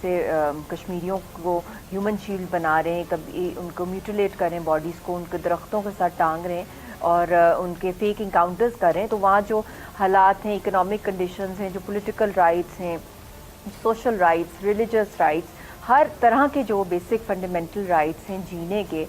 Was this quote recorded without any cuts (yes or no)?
no